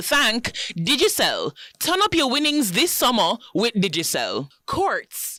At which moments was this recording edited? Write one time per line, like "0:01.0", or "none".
none